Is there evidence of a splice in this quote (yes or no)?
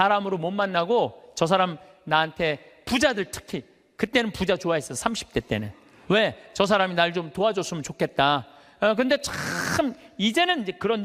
no